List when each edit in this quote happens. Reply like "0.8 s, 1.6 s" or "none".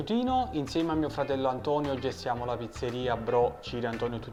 none